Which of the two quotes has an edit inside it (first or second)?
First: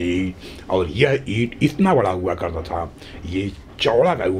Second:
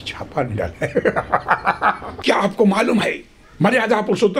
second